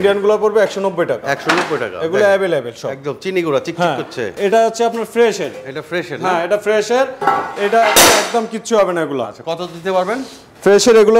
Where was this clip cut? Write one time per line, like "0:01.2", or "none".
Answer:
0:04.2